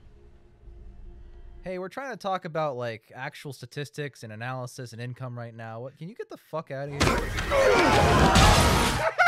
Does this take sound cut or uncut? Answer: uncut